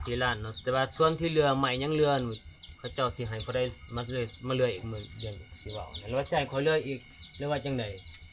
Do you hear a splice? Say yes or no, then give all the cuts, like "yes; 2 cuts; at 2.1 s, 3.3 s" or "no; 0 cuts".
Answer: no; 0 cuts